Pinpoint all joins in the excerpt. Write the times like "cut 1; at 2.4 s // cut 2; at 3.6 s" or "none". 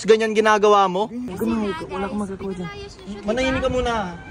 cut 1; at 1.3 s